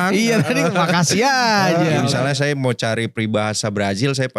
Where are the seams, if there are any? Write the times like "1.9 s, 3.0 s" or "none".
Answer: 2.0 s